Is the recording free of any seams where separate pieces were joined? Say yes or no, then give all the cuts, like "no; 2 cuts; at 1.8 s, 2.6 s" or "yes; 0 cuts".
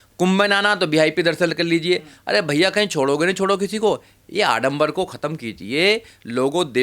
yes; 0 cuts